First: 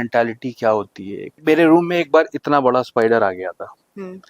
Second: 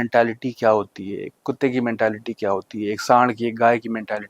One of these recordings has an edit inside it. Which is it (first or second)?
first